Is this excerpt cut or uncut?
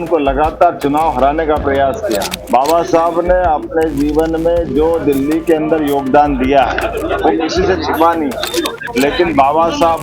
cut